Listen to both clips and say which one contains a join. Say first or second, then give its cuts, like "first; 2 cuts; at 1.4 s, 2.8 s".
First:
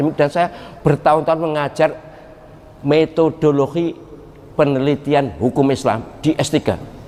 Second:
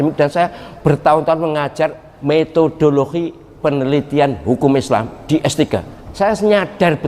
second; 3 cuts; at 2.1 s, 3.4 s, 6.0 s